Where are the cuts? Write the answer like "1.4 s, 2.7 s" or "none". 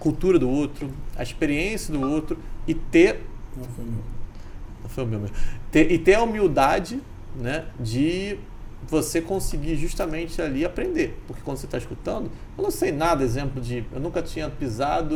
none